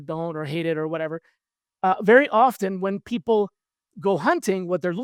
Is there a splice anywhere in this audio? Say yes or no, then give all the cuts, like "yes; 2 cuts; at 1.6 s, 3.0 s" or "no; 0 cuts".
no; 0 cuts